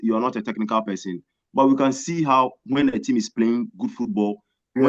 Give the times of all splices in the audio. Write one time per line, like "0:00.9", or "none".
none